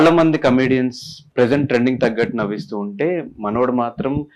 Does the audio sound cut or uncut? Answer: cut